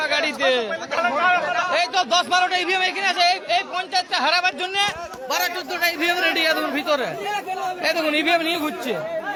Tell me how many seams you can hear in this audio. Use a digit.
0